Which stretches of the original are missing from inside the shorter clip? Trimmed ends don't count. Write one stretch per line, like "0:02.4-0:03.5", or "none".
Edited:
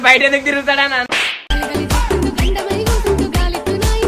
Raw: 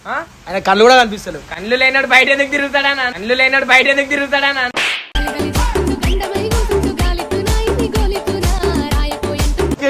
0:03.1-0:04.7